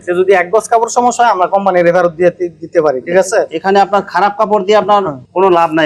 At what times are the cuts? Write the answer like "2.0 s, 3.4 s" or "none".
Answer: none